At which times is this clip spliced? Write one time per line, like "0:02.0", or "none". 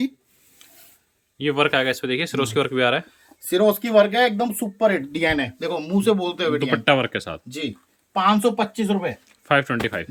none